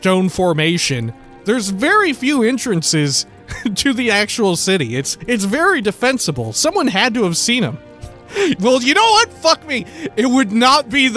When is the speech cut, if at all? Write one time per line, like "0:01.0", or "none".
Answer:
0:05.1